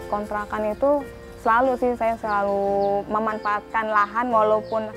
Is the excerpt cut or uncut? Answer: uncut